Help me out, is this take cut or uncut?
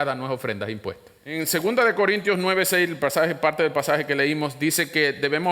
cut